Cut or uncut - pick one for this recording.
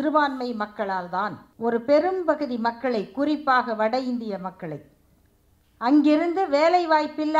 cut